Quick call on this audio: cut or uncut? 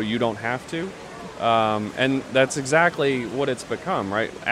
uncut